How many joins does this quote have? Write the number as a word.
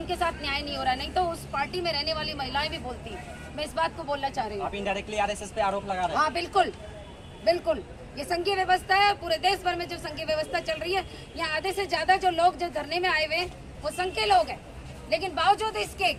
zero